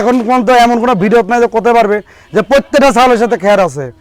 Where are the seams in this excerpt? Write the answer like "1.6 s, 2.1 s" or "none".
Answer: none